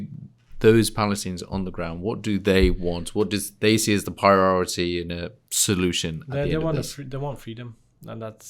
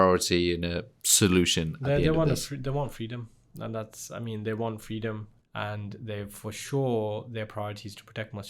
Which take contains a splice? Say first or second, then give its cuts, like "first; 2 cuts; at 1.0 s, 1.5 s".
second; 1 cut; at 5.3 s